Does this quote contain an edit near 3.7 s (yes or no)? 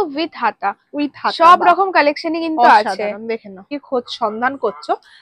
yes